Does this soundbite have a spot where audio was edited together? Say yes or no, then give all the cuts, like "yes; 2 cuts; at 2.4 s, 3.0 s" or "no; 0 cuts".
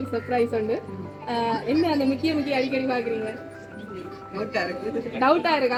no; 0 cuts